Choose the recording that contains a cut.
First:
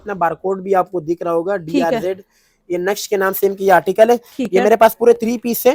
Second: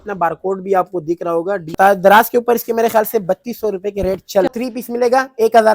second; 2 cuts; at 1.7 s, 4.5 s

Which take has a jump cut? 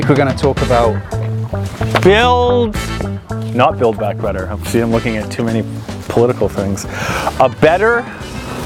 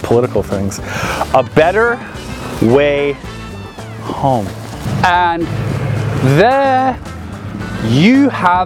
second; 1 cut; at 4.9 s

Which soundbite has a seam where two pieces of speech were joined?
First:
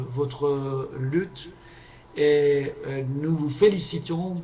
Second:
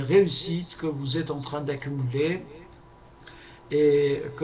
first; 1 cut; at 3.4 s

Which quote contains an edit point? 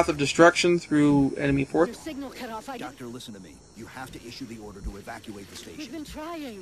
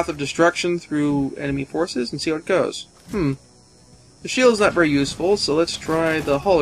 second; 1 cut; at 1.9 s

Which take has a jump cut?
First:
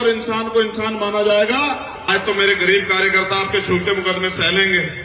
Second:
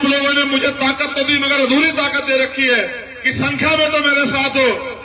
first; 1 cut; at 2.0 s

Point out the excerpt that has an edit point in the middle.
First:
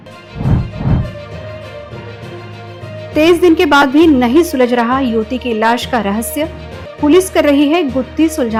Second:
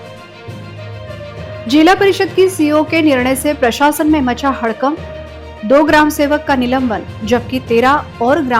second; 1 cut; at 1.3 s

